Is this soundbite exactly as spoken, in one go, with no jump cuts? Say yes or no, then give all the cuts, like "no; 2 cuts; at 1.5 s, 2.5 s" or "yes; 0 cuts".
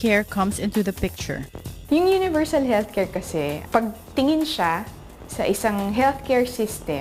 no; 1 cut; at 3.9 s